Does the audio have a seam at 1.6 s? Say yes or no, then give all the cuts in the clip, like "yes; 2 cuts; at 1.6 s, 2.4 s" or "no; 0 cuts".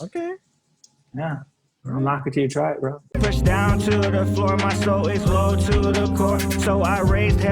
no; 1 cut; at 3.0 s